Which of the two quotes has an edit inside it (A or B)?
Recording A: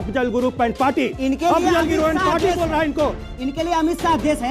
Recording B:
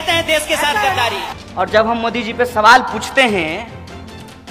B